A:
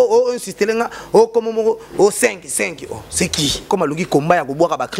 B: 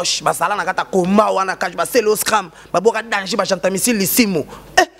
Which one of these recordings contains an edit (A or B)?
A